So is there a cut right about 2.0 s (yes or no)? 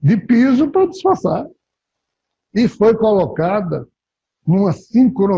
yes